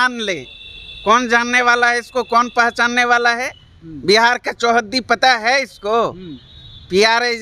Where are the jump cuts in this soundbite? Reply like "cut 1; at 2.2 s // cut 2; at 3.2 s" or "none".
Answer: none

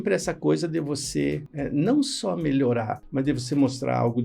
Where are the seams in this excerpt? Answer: cut 1; at 1.5 s // cut 2; at 3.0 s

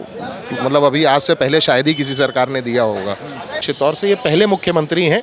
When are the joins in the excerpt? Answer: cut 1; at 3.5 s

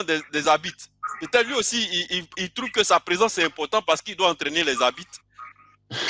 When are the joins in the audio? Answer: none

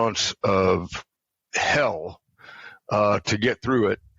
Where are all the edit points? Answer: none

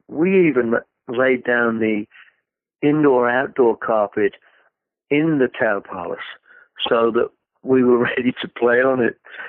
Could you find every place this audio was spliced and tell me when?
none

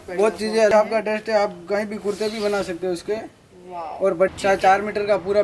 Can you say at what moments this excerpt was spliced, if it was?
cut 1; at 0.7 s // cut 2; at 4.3 s

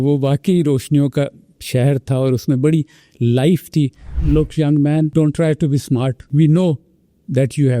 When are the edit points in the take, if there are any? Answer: cut 1; at 4.1 s // cut 2; at 5.1 s // cut 3; at 6.2 s

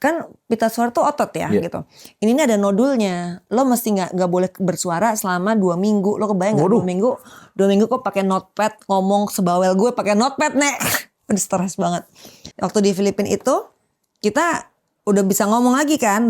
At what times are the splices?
cut 1; at 12.4 s

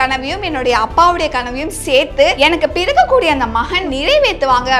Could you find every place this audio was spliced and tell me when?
cut 1; at 2.3 s // cut 2; at 3.8 s

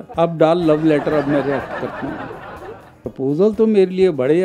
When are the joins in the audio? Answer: cut 1; at 2.9 s

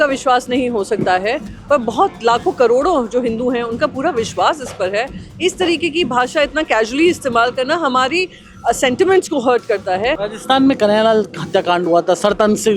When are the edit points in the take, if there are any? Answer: cut 1; at 10.3 s

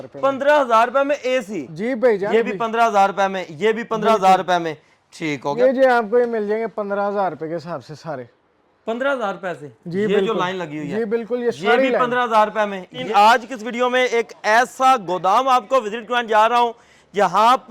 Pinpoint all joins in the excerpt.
cut 1; at 2.2 s // cut 2; at 5.5 s // cut 3; at 13.0 s

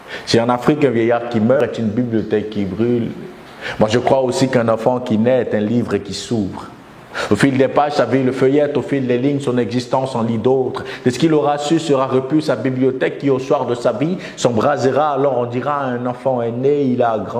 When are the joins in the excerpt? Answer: cut 1; at 1.6 s

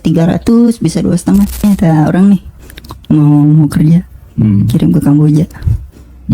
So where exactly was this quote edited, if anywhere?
cut 1; at 1.6 s

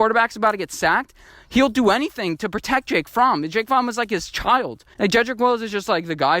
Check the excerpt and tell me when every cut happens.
cut 1; at 4.8 s

